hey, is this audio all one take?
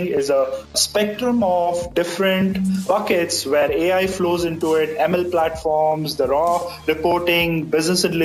no; 2 cuts; at 0.8 s, 2.8 s

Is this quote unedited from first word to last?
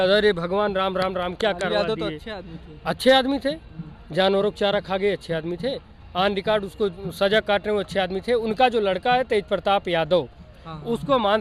yes; 0 cuts

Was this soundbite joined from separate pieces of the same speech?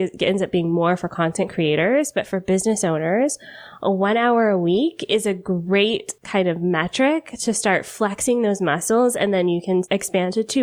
yes; 2 cuts; at 6.1 s, 9.9 s

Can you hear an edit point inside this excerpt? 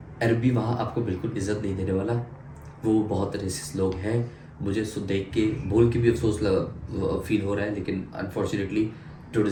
no; 0 cuts

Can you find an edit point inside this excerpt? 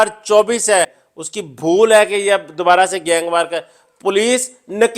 yes; 1 cut; at 0.9 s

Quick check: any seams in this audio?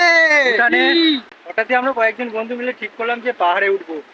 yes; 1 cut; at 1.3 s

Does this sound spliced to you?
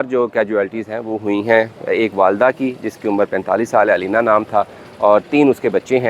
no; 0 cuts

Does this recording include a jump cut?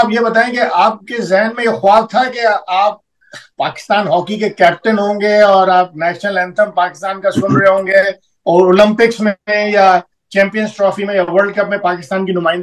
no; 0 cuts

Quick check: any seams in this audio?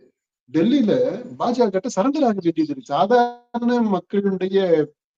yes; 1 cut; at 2.8 s

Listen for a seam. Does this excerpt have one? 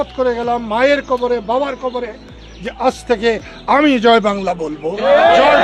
no; 0 cuts

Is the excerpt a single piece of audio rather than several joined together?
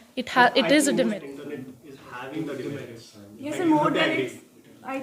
no; 1 cut; at 1.1 s

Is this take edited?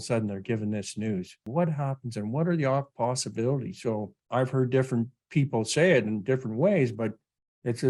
yes; 2 cuts; at 1.4 s, 4.2 s

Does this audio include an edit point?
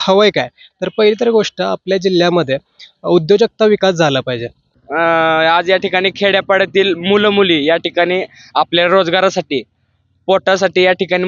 yes; 1 cut; at 4.8 s

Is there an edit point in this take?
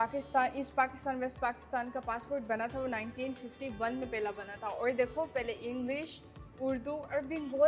no; 0 cuts

